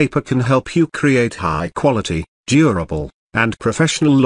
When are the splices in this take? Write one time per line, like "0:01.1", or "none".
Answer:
0:02.3
0:03.2